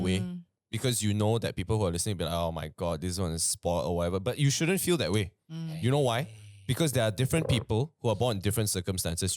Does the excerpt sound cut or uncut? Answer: uncut